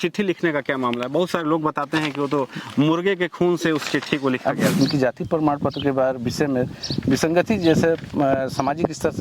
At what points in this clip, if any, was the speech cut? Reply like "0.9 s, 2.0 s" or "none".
4.7 s